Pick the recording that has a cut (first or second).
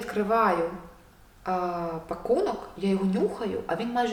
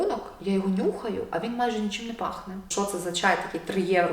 second